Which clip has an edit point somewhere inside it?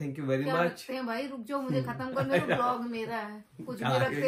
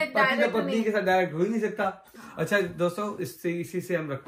second; 1 cut; at 2.1 s

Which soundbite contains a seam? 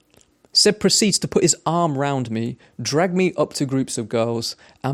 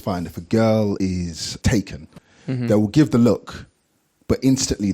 second; 1 cut; at 1.0 s

